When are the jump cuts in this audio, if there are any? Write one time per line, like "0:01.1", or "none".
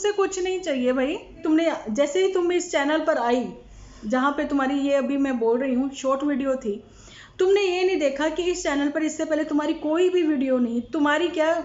0:01.4